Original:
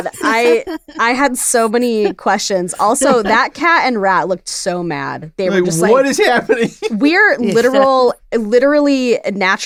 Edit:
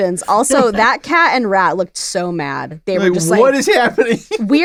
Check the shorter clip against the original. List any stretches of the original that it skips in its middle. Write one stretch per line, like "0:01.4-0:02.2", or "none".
none